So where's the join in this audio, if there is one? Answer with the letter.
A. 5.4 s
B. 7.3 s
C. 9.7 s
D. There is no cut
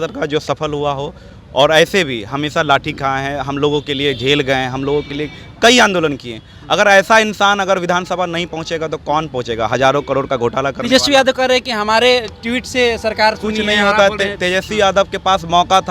D